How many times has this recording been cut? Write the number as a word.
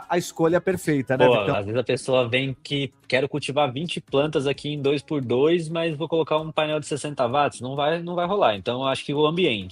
one